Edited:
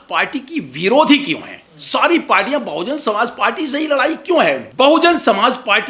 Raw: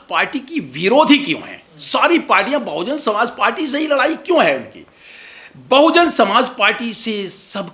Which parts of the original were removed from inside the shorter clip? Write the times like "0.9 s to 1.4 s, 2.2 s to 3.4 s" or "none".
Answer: 4.6 s to 5.6 s